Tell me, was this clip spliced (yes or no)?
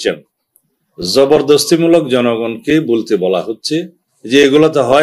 no